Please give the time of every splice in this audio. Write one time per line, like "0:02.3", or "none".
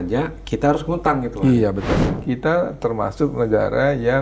0:02.1